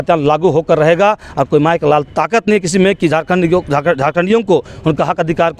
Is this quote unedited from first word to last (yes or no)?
yes